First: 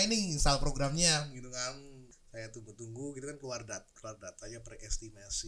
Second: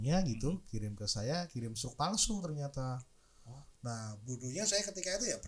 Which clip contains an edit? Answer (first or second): first